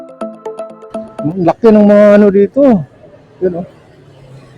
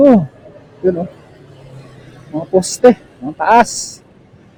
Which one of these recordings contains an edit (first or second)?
first